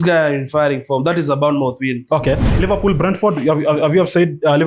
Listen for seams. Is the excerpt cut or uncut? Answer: cut